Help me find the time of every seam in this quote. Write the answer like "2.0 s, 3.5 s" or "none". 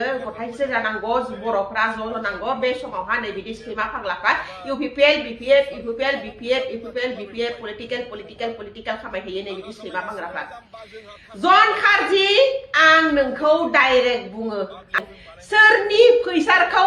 14.9 s

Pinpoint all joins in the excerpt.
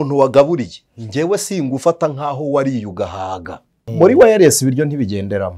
3.8 s

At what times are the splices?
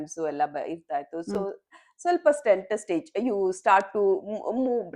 none

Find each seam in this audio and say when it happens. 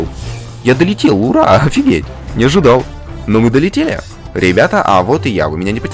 none

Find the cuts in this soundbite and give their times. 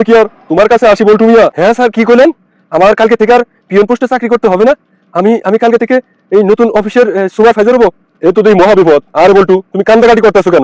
1.6 s, 8.1 s

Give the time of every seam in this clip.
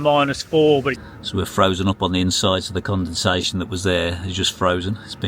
0.9 s

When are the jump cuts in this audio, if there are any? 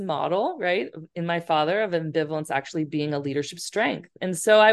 none

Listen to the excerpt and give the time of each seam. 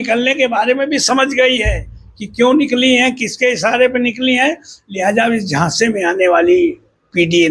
none

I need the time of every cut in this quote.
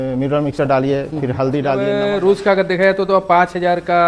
1.9 s

